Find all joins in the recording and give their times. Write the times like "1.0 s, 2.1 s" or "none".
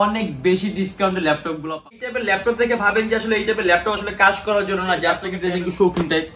2.1 s, 5.3 s